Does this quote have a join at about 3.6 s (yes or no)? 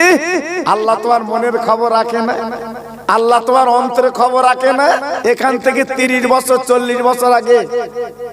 no